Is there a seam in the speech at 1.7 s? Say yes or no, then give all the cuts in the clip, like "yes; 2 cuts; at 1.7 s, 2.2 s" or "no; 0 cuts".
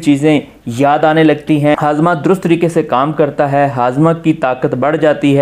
yes; 1 cut; at 1.7 s